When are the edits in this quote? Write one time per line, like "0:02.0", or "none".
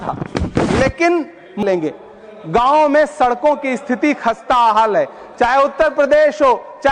0:01.6